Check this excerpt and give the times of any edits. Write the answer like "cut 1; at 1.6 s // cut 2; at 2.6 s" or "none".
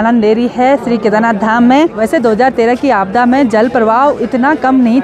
cut 1; at 2.0 s